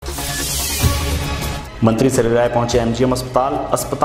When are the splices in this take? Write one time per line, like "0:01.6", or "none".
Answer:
none